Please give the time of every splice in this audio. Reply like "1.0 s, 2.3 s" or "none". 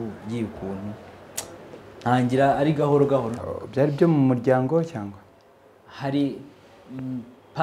3.4 s